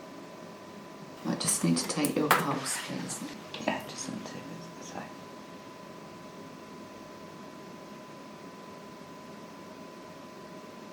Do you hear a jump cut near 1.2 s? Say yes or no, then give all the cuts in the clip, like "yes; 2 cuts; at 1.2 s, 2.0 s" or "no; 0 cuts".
yes; 2 cuts; at 1.2 s, 3.4 s